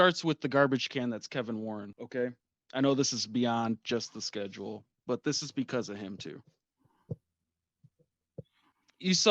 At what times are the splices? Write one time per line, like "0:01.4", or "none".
0:01.9